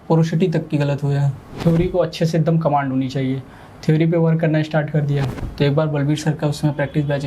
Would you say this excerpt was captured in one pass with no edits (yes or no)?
no